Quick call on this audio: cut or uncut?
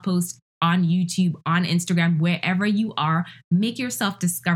uncut